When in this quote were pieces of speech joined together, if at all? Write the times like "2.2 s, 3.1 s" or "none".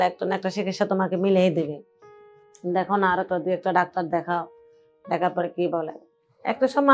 6.0 s

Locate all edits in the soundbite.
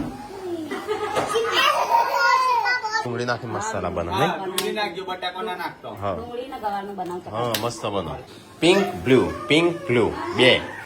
3.1 s

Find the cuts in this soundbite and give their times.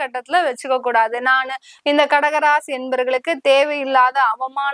1.7 s

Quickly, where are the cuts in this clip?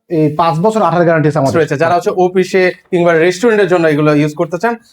1.7 s

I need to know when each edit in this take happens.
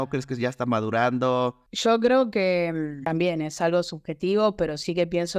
1.7 s, 3.0 s

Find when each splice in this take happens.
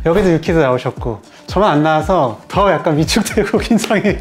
none

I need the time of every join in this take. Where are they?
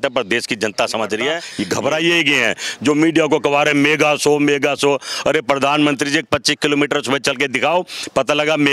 1.5 s

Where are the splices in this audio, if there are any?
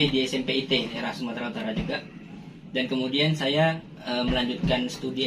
1.0 s

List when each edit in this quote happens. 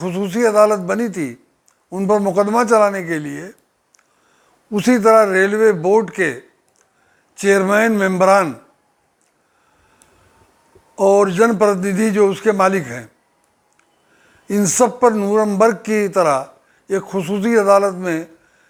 none

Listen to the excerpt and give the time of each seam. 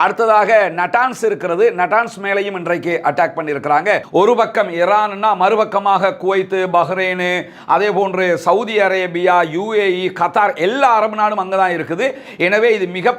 4.0 s

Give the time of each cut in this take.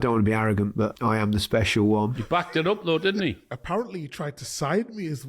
1.0 s, 2.2 s, 3.5 s

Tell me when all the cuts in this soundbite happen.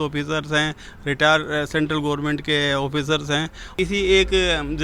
3.7 s

